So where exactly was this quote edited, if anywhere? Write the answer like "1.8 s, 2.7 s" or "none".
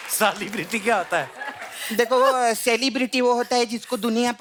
none